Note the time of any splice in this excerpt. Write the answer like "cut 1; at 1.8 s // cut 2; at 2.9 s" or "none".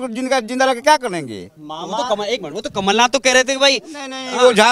none